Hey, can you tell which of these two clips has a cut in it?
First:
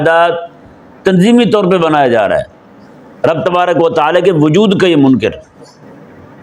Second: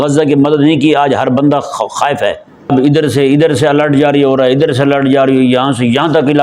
second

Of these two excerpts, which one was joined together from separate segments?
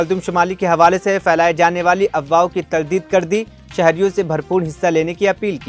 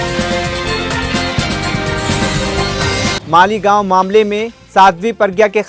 second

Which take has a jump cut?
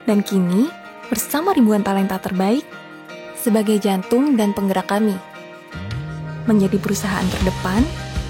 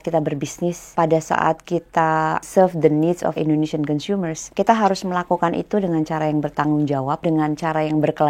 second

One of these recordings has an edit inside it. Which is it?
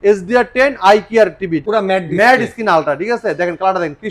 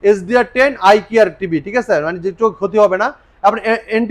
first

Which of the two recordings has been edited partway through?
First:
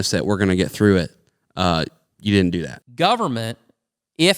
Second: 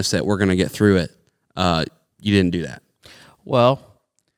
first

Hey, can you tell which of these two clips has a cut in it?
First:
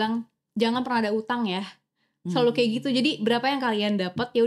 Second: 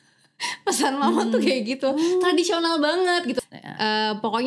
second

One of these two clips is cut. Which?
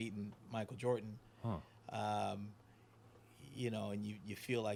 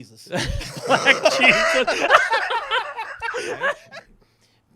second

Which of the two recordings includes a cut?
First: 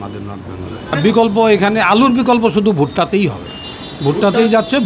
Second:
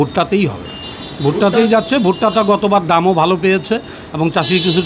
first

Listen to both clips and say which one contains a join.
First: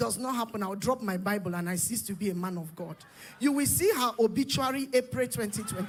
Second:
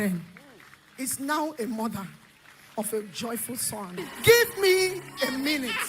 second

